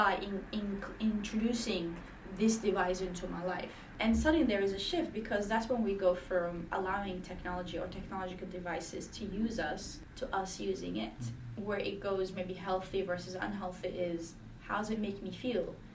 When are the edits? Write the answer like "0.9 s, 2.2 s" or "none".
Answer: 3.8 s, 10.0 s, 11.6 s